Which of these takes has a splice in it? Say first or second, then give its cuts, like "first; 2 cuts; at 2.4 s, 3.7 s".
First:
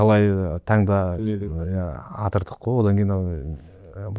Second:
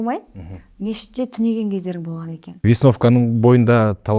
second; 1 cut; at 2.6 s